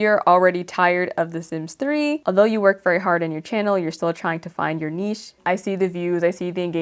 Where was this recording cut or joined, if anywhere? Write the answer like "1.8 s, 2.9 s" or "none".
2.2 s, 5.4 s